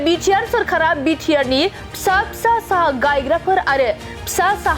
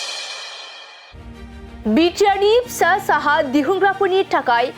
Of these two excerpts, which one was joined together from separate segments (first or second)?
second